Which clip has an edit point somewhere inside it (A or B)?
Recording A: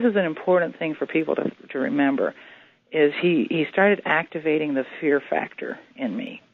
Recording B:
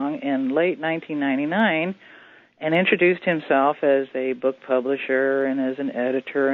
B